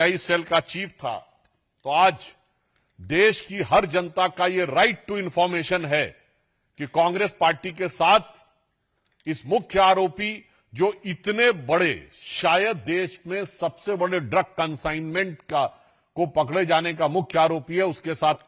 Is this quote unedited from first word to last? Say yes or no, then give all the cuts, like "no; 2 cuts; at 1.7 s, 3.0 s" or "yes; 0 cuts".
yes; 0 cuts